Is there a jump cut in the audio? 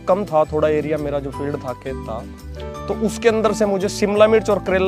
no; 0 cuts

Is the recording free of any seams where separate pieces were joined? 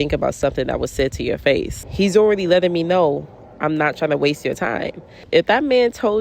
no; 2 cuts; at 1.8 s, 5.2 s

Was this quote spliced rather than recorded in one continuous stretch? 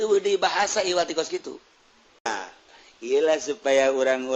yes; 1 cut; at 2.3 s

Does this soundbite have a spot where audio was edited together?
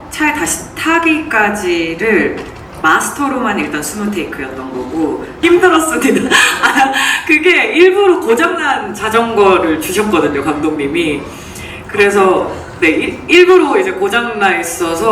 yes; 1 cut; at 5.4 s

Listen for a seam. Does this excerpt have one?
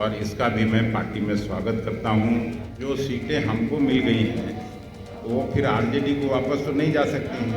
yes; 1 cut; at 2.6 s

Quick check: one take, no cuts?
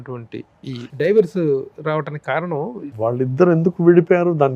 no; 1 cut; at 2.9 s

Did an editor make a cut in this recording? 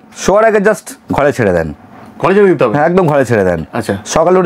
no; 0 cuts

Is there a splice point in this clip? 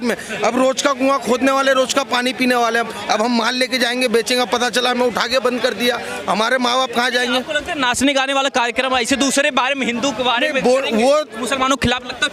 no; 0 cuts

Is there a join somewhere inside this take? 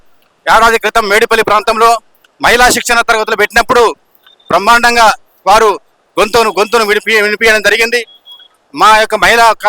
no; 0 cuts

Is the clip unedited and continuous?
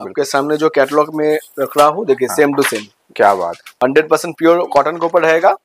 no; 1 cut; at 3.7 s

